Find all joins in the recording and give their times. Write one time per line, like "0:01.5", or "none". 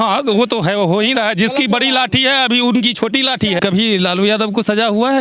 0:03.6